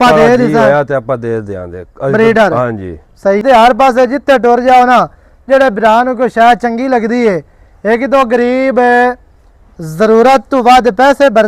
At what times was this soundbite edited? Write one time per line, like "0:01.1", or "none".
0:03.4